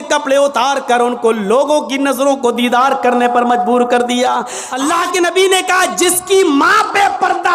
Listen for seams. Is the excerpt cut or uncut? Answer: cut